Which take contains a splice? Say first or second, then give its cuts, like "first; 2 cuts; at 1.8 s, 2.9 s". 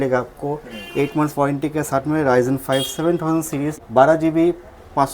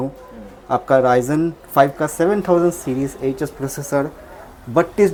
first; 1 cut; at 3.8 s